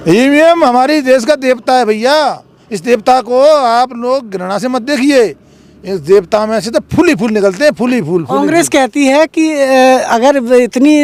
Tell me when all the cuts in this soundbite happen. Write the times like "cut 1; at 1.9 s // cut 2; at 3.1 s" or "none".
none